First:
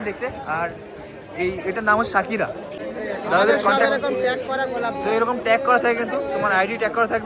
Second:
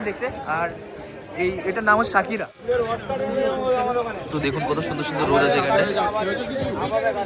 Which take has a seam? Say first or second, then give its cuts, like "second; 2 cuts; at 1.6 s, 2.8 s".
second; 1 cut; at 2.5 s